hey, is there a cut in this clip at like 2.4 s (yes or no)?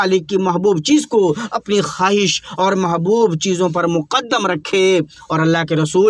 no